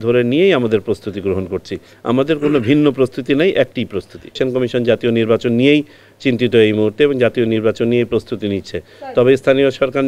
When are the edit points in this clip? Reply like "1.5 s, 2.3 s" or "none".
4.4 s